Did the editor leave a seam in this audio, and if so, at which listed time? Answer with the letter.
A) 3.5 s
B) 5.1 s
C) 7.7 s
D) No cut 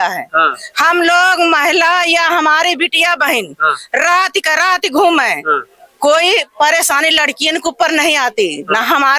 D